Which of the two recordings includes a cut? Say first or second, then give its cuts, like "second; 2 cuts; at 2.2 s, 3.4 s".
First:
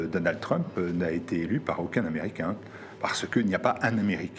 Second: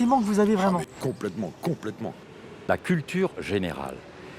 second; 1 cut; at 2.5 s